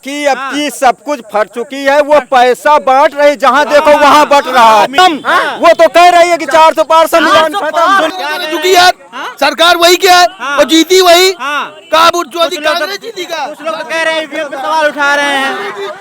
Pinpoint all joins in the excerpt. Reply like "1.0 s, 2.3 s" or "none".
5.0 s, 8.1 s